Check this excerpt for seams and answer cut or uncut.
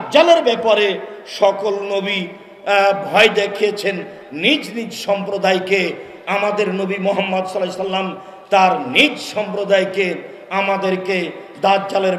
uncut